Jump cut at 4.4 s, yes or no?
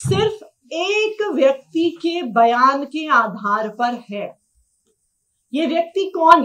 no